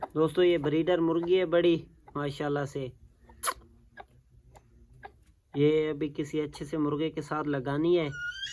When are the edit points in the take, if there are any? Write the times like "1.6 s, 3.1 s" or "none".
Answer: none